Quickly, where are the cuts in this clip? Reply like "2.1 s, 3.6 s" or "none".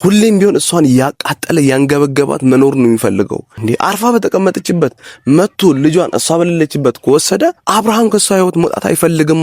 3.5 s, 7.6 s